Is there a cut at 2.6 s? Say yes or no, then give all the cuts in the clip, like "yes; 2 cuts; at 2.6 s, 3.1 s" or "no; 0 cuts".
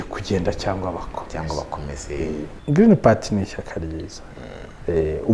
yes; 1 cut; at 2.6 s